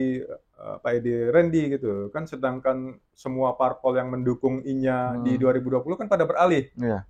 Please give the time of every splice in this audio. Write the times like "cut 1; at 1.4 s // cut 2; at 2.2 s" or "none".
none